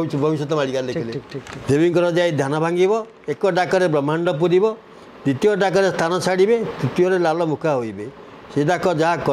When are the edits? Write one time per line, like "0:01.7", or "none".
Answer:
0:01.5